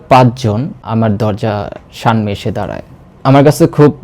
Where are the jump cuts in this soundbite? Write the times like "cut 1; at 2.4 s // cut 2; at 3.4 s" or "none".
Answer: cut 1; at 0.8 s // cut 2; at 3.1 s